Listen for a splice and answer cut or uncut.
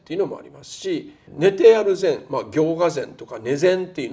cut